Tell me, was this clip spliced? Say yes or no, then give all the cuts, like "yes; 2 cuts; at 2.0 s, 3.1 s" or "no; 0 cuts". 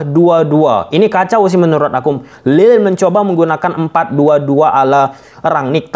no; 0 cuts